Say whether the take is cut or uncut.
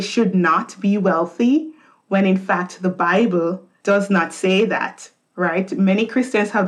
cut